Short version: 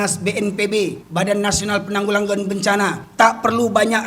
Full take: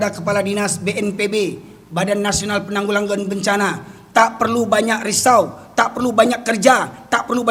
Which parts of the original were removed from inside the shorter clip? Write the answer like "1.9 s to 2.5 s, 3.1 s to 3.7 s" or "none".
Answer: 1.6 s to 1.8 s, 3.8 s to 4.0 s